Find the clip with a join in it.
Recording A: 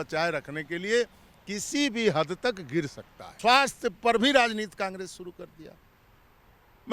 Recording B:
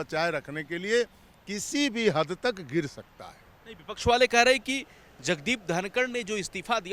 A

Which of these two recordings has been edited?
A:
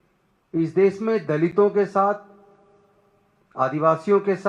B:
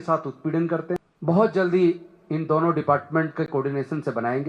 B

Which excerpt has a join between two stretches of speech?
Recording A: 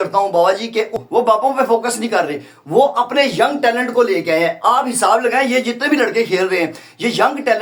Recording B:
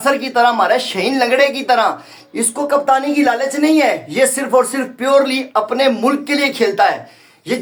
A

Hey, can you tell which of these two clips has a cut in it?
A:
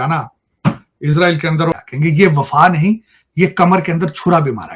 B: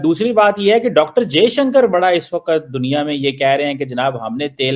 A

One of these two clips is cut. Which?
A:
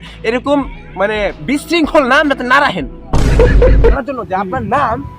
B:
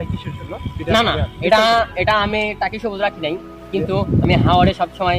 A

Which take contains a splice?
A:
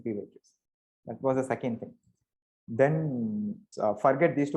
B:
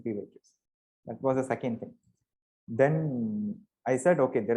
A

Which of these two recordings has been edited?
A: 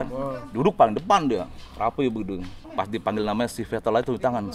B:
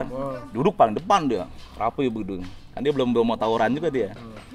A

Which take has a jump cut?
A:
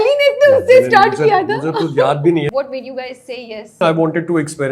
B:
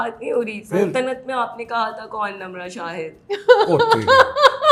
A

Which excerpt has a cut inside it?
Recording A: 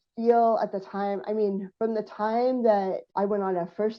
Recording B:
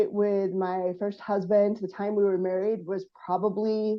A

